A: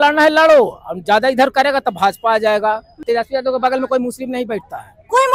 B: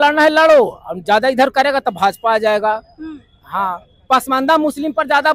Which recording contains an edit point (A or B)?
A